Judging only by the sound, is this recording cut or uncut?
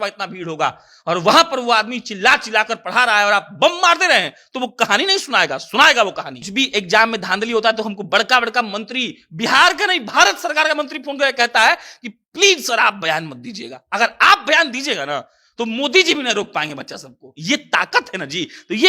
cut